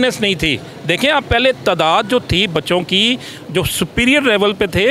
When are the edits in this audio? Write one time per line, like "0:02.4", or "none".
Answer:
none